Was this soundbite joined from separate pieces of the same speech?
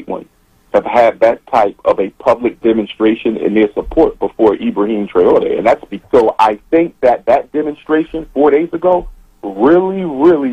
yes; 1 cut; at 5.9 s

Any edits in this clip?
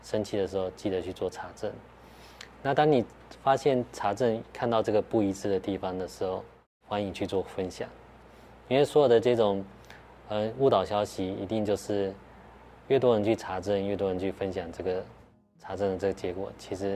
no; 0 cuts

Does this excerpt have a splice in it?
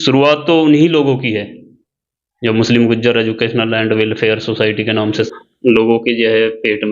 yes; 1 cut; at 5.2 s

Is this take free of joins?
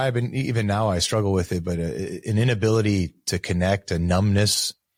yes; 0 cuts

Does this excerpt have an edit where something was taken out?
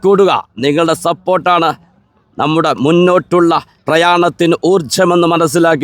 yes; 1 cut; at 3.7 s

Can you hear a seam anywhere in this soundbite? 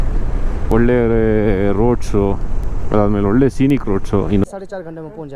yes; 1 cut; at 4.4 s

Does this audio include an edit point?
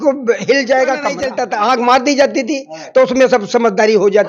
yes; 1 cut; at 1.3 s

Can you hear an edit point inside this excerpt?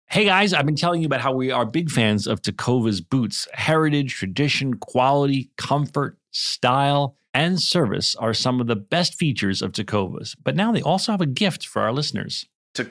no; 0 cuts

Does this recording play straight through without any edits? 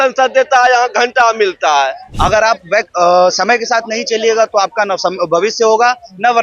no; 1 cut; at 2.1 s

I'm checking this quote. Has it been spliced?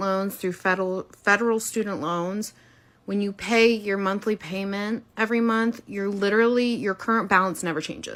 no; 0 cuts

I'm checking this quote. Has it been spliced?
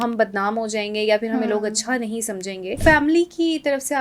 yes; 1 cut; at 2.8 s

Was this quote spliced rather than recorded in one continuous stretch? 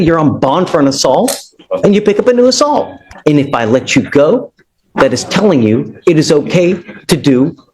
yes; 1 cut; at 3.0 s

